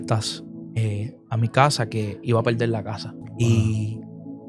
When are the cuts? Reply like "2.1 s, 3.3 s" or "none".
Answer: 3.2 s